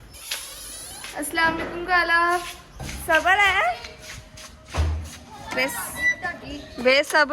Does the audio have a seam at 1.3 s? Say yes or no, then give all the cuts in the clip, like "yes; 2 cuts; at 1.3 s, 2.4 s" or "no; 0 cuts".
no; 1 cut; at 2.9 s